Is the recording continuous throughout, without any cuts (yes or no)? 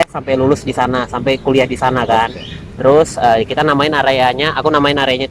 yes